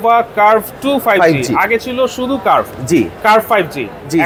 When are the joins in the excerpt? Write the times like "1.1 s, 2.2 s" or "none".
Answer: none

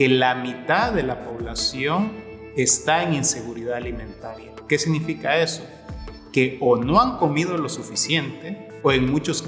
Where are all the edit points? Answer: none

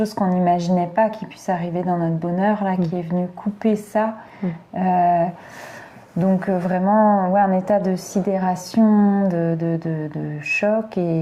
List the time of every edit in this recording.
none

